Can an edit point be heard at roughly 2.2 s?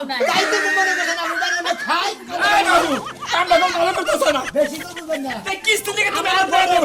yes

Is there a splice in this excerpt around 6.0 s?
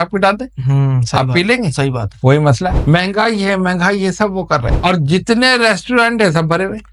no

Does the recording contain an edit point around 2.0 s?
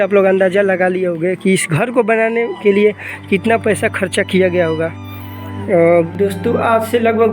no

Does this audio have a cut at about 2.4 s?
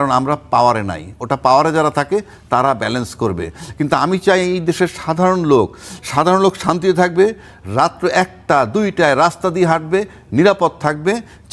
no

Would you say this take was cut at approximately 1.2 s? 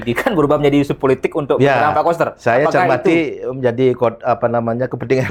no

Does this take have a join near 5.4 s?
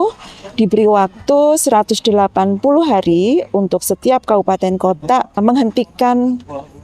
yes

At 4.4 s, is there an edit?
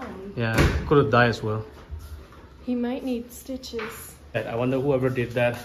yes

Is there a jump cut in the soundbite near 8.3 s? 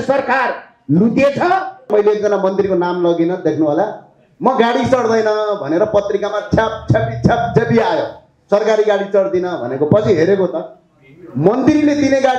no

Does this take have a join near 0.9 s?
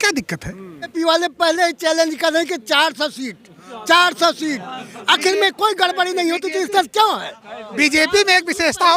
yes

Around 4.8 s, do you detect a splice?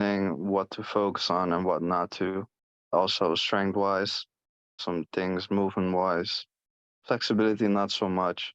yes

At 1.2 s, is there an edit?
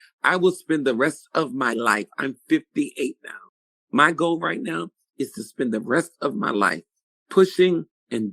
no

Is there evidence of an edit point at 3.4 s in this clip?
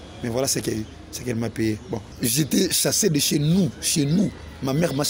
no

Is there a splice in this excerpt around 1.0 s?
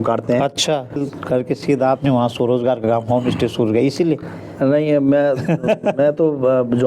yes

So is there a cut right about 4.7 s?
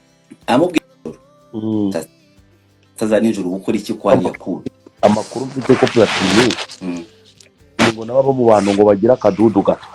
no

